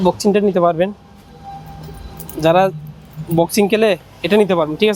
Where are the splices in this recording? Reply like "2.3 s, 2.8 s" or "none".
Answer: none